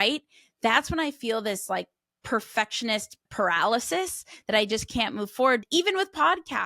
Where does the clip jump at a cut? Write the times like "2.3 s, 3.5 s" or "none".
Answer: 5.6 s